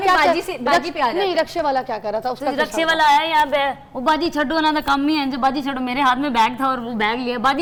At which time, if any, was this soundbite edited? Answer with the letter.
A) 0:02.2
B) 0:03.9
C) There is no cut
C